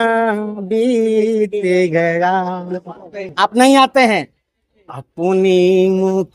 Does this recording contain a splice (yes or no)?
no